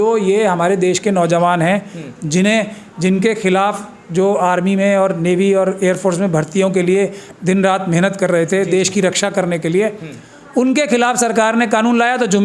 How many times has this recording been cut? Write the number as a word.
zero